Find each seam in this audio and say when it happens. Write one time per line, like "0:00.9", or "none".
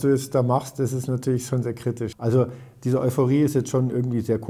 0:02.1